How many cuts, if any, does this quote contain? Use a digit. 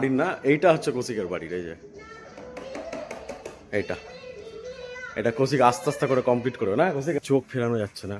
1